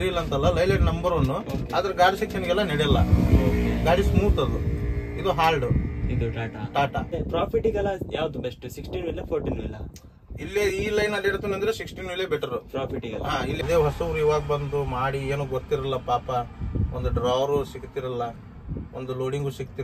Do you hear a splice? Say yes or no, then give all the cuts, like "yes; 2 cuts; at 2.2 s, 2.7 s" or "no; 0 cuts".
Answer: yes; 2 cuts; at 7.1 s, 13.6 s